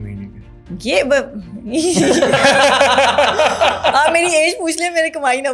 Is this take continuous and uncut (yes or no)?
yes